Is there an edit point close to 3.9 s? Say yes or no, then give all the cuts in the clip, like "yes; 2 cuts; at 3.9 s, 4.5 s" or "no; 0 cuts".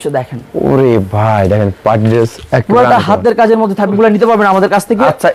yes; 1 cut; at 3.9 s